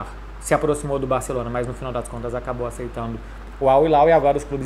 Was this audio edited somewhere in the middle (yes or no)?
no